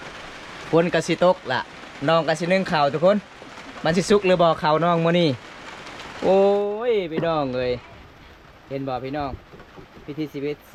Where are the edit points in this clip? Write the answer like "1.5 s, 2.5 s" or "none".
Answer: none